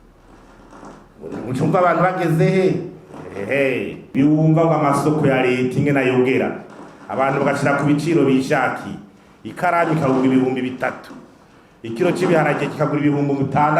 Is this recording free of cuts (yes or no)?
no